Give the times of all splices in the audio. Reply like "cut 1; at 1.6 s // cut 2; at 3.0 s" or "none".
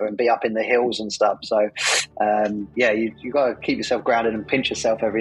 none